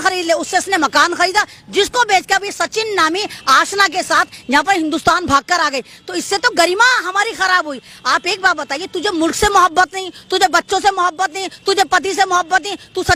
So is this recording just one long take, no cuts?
yes; 0 cuts

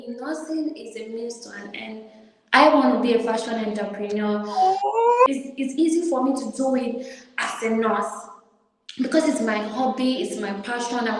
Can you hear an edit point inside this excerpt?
yes; 1 cut; at 5.3 s

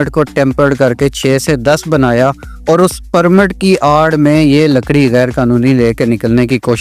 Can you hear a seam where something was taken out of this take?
no; 0 cuts

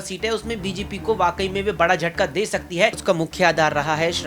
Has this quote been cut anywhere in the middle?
yes; 1 cut; at 3.0 s

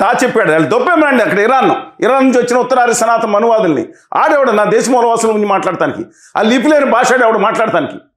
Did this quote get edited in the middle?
no; 0 cuts

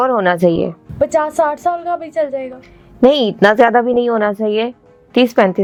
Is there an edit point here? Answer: no; 0 cuts

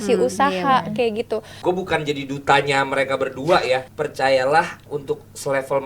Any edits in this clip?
yes; 3 cuts; at 1.5 s, 3.9 s, 4.9 s

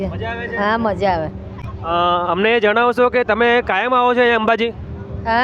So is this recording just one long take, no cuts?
yes; 0 cuts

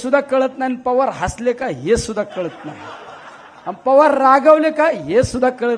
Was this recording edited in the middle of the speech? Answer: no; 0 cuts

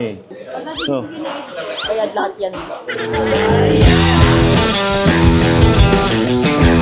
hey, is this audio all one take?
yes; 0 cuts

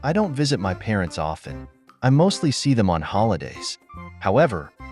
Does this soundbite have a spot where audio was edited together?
no; 0 cuts

